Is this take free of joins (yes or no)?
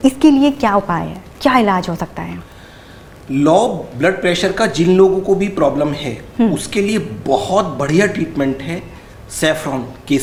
yes